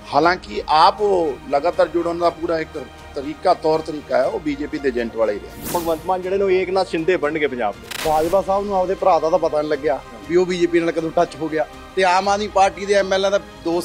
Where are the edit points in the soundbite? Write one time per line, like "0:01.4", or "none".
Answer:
0:05.6
0:07.9